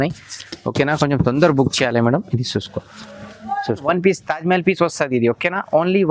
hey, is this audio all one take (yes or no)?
no